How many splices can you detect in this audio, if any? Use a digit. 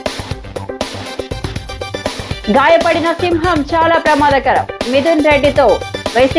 1